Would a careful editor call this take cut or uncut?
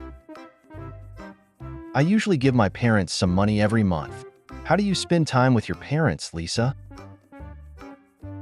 cut